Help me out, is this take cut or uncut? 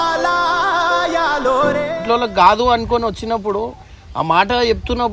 cut